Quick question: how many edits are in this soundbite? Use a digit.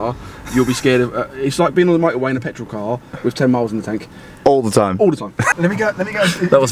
1